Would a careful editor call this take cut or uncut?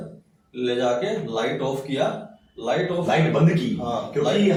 uncut